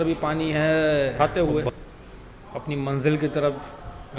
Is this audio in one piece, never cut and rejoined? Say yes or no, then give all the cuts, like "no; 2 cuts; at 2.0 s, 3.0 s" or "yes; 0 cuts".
no; 1 cut; at 1.1 s